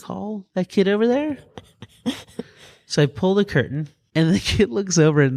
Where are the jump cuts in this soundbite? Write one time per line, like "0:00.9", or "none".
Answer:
none